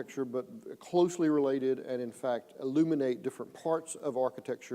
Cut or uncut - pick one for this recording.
cut